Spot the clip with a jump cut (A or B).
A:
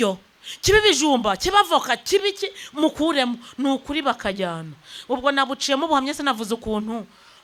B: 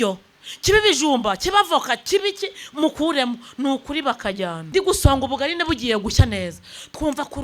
B